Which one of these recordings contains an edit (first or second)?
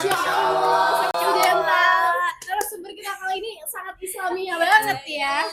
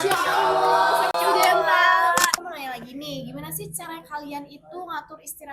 second